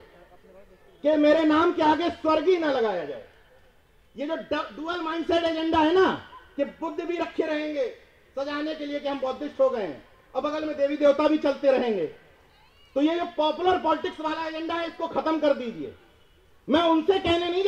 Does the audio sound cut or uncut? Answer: uncut